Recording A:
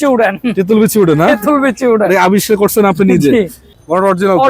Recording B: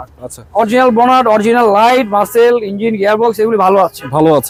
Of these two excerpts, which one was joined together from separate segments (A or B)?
A